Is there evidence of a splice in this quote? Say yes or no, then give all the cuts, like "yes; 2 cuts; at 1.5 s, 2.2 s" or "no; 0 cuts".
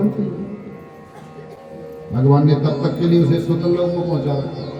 no; 0 cuts